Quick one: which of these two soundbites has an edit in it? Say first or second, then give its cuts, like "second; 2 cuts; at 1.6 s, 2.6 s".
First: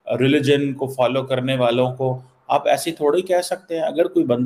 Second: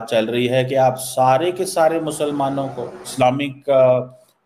second; 1 cut; at 3.1 s